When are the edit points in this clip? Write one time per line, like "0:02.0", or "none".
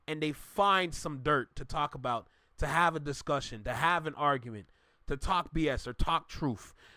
none